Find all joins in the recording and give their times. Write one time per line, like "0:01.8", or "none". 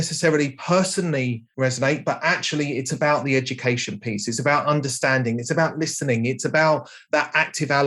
0:06.9